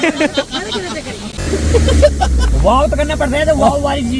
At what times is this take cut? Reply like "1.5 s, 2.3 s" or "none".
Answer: 1.3 s